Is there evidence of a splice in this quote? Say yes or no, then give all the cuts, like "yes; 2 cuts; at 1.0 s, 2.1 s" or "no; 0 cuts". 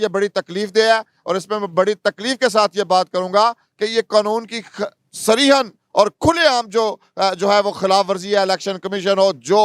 no; 0 cuts